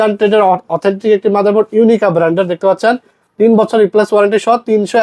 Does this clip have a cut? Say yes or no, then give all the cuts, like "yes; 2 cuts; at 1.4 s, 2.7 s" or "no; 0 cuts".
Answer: no; 0 cuts